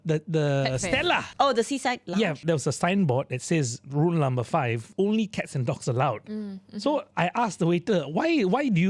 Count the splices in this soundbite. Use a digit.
3